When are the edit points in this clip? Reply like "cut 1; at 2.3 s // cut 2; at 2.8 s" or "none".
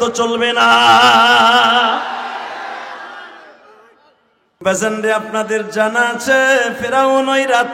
cut 1; at 4.6 s